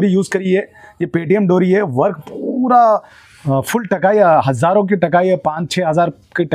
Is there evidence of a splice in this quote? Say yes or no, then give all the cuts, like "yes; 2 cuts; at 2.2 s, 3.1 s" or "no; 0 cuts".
no; 0 cuts